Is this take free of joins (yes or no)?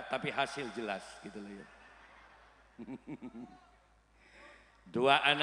yes